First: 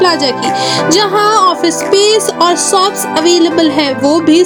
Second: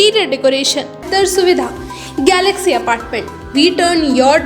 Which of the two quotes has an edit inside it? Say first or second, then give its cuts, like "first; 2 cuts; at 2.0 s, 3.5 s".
second; 1 cut; at 1.1 s